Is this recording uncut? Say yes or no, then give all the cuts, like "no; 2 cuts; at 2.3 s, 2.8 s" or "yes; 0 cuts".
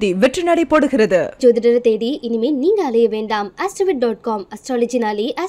yes; 0 cuts